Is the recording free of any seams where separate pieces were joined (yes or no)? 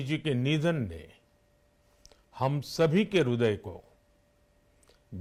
yes